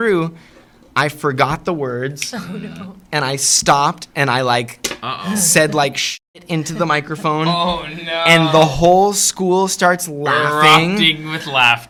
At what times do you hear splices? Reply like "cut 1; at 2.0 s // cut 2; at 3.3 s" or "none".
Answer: none